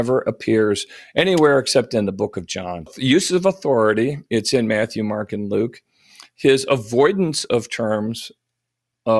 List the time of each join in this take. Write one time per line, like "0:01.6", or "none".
0:02.9